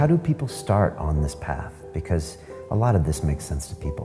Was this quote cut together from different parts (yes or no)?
no